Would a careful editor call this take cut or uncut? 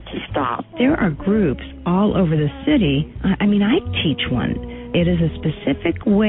uncut